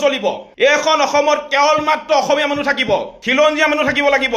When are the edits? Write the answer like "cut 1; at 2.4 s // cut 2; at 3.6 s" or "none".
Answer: none

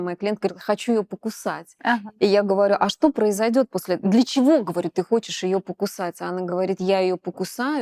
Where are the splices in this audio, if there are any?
none

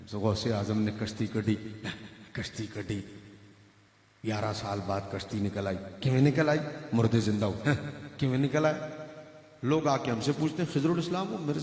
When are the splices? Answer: none

